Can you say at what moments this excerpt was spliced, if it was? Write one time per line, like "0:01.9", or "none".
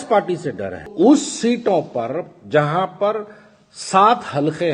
0:00.9